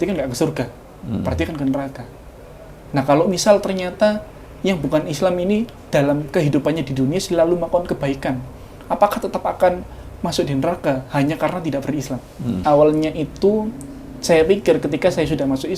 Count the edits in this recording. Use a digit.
1